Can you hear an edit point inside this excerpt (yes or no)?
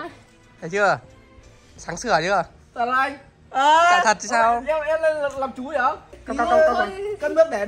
yes